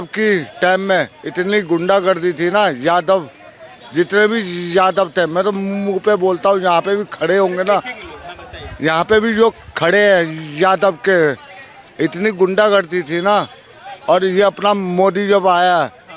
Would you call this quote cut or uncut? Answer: uncut